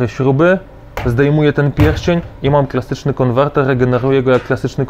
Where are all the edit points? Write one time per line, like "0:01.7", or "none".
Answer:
none